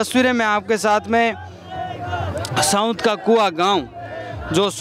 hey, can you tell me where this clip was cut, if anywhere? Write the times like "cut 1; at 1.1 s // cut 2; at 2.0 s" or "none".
none